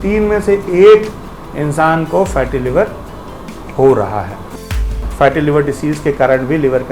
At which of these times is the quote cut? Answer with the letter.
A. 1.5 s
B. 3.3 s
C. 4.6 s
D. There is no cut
C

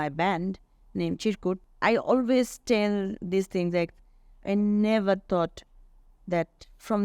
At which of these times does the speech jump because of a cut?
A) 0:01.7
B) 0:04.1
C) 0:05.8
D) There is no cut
A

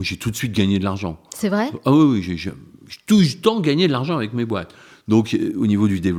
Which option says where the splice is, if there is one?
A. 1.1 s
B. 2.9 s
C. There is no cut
C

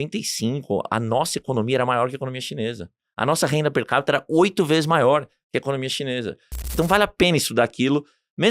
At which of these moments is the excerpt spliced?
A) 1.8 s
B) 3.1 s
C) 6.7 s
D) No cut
C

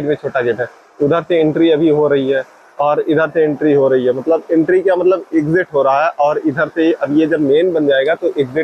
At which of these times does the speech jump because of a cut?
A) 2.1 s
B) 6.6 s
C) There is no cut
C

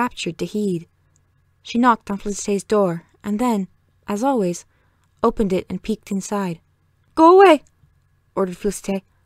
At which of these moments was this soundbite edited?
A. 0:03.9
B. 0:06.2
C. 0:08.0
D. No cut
B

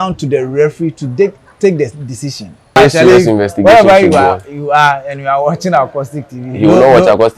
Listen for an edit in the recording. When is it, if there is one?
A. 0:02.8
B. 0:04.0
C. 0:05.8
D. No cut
A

